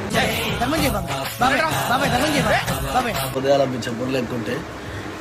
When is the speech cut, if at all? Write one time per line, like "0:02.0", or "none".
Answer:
0:03.3